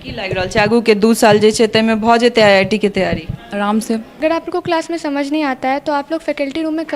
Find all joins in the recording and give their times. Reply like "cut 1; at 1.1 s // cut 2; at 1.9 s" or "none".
cut 1; at 4.2 s